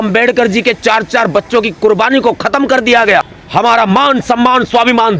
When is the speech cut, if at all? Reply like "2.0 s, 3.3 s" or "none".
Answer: 3.4 s